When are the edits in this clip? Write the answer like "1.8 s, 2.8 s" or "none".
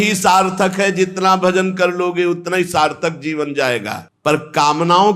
none